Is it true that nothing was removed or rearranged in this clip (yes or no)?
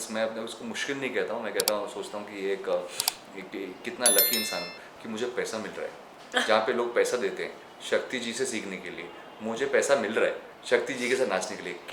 yes